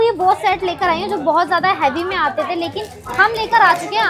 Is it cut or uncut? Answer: uncut